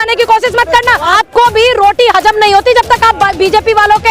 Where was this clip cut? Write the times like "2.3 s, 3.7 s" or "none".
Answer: 1.1 s